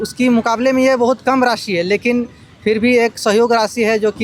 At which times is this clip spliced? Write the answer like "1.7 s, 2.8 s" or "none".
none